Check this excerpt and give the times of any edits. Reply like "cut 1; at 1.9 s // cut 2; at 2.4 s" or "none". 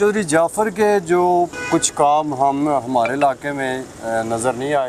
none